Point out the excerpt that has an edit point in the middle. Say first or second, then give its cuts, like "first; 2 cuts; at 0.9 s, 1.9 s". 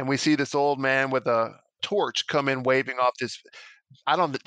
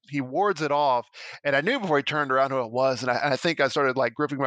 first; 1 cut; at 1.7 s